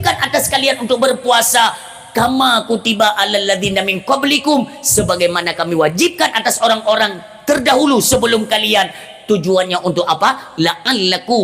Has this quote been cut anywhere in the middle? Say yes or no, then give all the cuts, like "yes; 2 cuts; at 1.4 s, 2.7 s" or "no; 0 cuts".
no; 0 cuts